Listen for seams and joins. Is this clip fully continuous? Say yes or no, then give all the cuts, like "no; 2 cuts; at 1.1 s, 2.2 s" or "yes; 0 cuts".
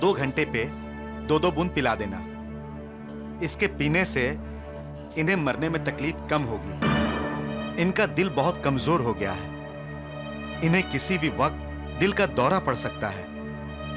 no; 1 cut; at 6.8 s